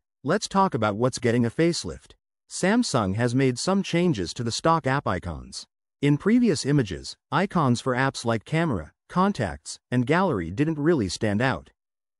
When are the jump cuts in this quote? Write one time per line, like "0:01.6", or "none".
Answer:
none